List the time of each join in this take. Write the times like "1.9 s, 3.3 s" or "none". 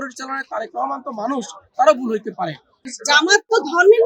3.0 s